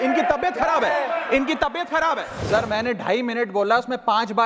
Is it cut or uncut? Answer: cut